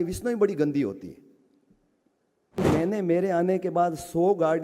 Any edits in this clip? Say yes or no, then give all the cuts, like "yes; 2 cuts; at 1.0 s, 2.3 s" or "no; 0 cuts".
yes; 1 cut; at 2.4 s